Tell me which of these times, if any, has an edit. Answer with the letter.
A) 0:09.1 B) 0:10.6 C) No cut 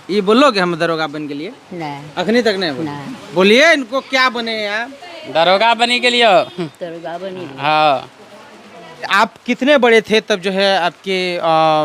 A